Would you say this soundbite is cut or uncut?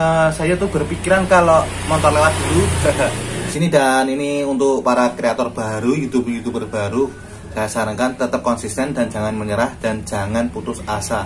cut